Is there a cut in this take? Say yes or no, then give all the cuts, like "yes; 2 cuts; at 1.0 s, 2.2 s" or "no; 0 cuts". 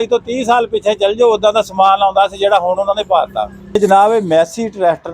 yes; 1 cut; at 3.8 s